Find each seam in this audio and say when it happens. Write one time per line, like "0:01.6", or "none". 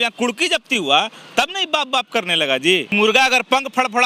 0:02.9